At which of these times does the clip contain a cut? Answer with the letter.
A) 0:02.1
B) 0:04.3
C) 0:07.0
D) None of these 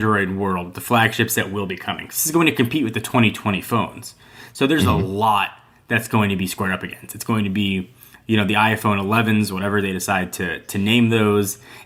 D